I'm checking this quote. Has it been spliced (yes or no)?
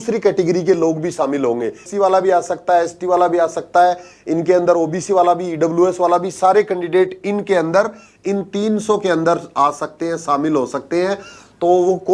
yes